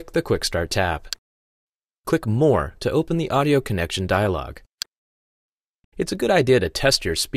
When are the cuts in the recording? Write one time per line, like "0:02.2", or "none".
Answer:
0:02.2